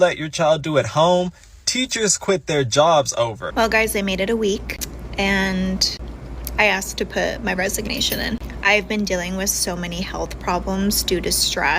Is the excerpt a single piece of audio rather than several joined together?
no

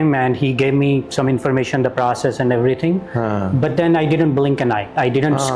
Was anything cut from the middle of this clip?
no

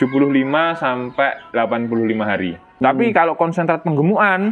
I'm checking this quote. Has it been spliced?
yes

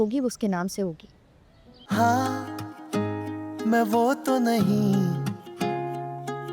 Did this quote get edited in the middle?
yes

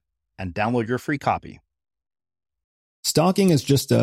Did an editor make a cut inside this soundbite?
yes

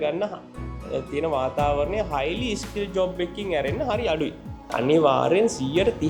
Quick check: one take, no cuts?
no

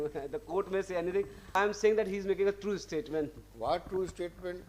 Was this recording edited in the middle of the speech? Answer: yes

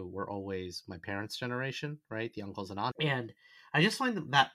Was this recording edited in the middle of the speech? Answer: yes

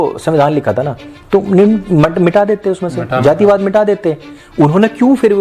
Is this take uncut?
yes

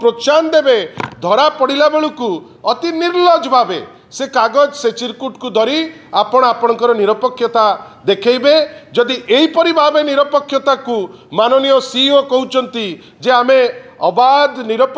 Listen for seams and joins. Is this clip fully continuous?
yes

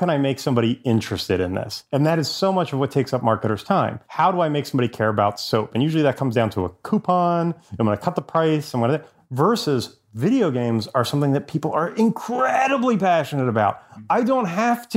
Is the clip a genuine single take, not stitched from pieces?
no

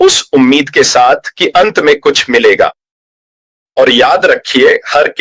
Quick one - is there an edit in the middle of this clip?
no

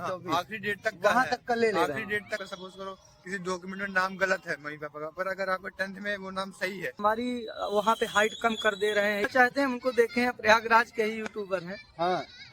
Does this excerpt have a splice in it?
yes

